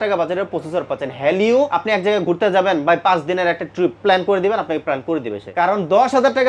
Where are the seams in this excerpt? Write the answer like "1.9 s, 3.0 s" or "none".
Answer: 1.7 s, 4.0 s, 5.4 s

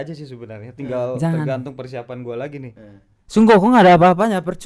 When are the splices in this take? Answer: none

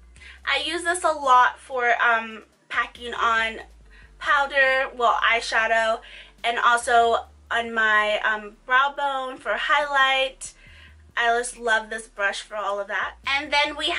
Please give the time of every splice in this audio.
8.9 s

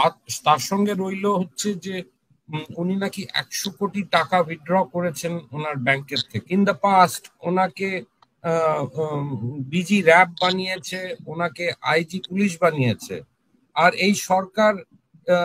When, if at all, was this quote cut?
6.3 s

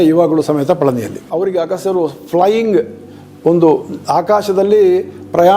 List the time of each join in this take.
1.2 s

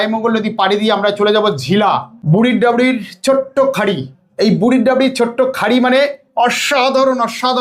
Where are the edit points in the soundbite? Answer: 2.1 s

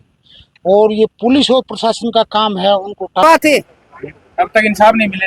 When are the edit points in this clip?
3.2 s

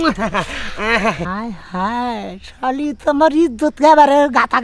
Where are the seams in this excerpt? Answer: 1.3 s

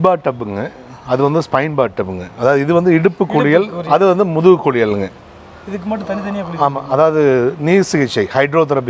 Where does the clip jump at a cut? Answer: none

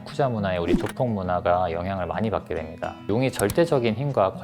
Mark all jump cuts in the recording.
3.1 s

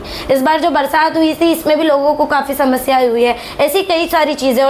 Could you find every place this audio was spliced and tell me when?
none

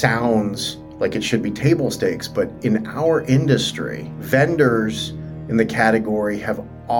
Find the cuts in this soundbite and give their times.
none

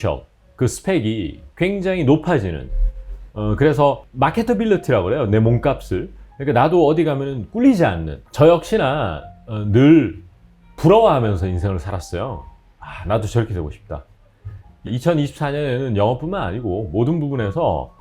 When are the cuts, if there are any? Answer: 8.2 s, 14.9 s

